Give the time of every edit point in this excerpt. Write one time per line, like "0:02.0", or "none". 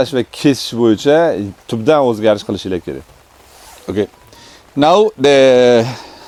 none